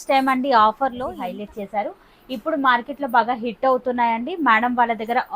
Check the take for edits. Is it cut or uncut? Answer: cut